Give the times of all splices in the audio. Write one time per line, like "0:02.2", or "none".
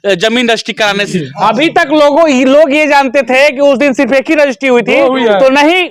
0:01.2